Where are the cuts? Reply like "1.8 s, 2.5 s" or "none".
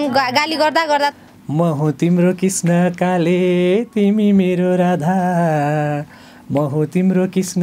1.3 s